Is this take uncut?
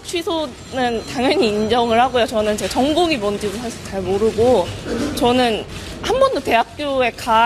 no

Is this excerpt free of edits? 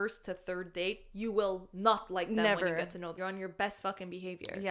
no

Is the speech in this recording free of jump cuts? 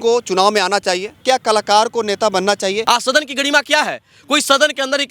no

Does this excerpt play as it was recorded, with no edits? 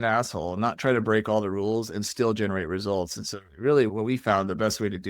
no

